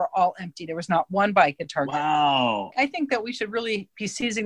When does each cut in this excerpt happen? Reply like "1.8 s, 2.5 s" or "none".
2.8 s